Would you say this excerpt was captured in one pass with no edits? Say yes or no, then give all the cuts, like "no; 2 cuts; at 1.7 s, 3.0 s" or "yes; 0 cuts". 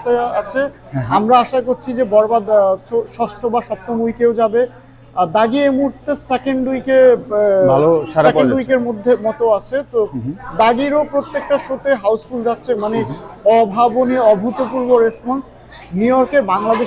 yes; 0 cuts